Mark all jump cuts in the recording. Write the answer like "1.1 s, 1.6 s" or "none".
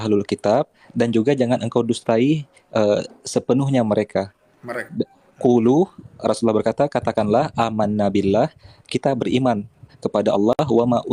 none